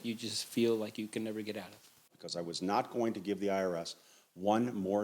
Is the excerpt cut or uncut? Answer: cut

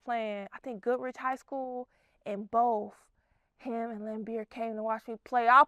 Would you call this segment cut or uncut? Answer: uncut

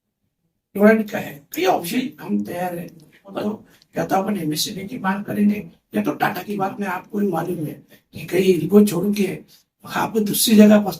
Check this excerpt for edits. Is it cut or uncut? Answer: cut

